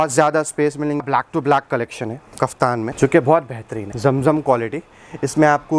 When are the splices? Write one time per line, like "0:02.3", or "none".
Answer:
0:01.0
0:02.9
0:03.8